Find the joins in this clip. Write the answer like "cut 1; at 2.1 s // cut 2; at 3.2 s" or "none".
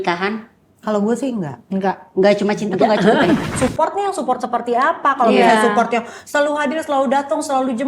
cut 1; at 3.5 s